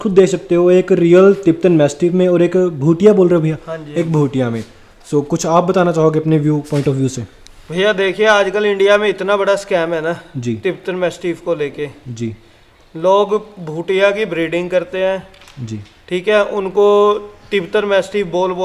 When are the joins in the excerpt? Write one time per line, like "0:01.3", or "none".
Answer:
none